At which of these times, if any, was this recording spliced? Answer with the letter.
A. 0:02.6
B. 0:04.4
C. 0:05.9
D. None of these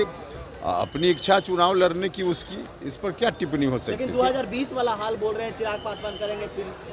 D